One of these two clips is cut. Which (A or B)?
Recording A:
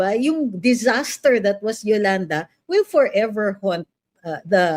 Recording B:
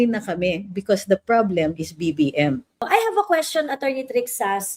B